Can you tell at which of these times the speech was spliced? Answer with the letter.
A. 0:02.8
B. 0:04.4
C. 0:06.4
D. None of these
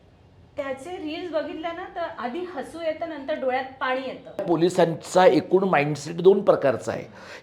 B